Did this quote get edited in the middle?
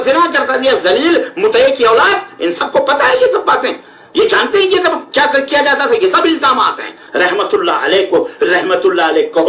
yes; 1 cut; at 7.0 s

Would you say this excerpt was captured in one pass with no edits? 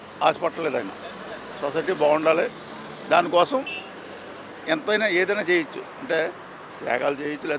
yes; 0 cuts

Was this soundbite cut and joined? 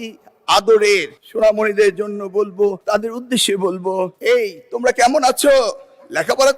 yes; 3 cuts; at 1.2 s, 2.8 s, 4.2 s

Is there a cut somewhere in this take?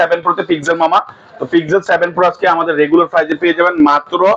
no; 0 cuts

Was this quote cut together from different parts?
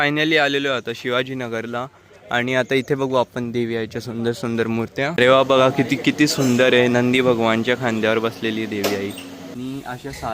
yes; 2 cuts; at 5.1 s, 9.5 s

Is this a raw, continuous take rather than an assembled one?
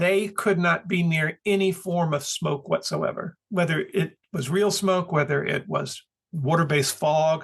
yes; 0 cuts

